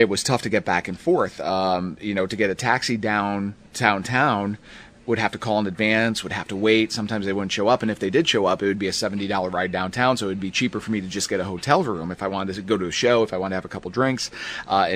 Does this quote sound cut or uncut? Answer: uncut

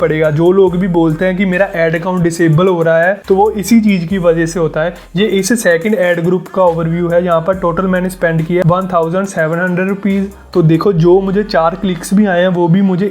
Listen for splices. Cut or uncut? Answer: cut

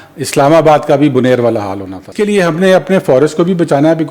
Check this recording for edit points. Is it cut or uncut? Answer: cut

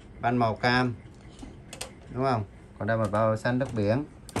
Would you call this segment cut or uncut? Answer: uncut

